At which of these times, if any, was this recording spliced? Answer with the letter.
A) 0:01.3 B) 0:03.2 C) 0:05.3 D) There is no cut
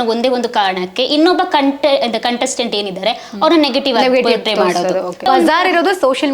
C